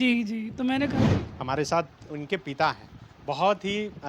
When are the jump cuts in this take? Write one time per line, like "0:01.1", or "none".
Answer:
0:01.1